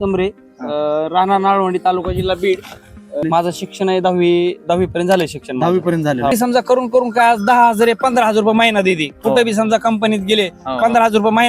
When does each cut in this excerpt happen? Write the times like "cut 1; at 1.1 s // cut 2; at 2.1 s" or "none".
cut 1; at 3.2 s // cut 2; at 6.3 s